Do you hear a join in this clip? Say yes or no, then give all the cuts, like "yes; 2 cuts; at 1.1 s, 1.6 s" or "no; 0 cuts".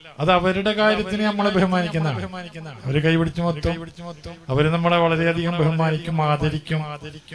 no; 0 cuts